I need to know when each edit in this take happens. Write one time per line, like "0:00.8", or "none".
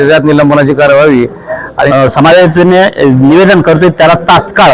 0:01.9

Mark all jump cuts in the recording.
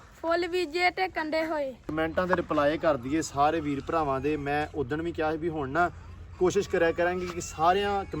0:01.8

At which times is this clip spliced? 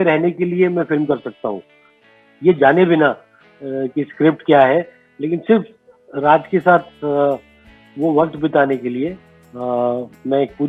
none

